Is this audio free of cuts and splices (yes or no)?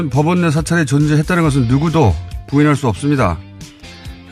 no